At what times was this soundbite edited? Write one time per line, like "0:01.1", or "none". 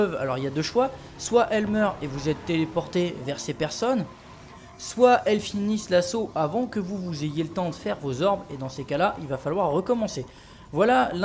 0:10.2